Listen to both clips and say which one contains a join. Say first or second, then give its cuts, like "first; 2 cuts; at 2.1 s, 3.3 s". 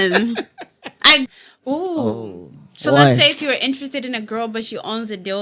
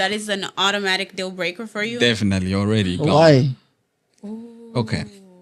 first; 1 cut; at 1.3 s